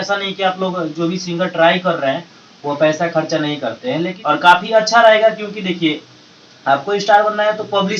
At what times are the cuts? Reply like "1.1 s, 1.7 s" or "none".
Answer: 4.1 s